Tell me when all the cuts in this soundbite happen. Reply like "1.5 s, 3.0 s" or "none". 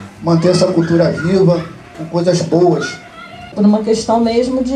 3.5 s